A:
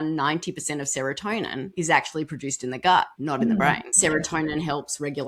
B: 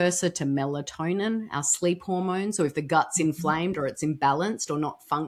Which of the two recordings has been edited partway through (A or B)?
A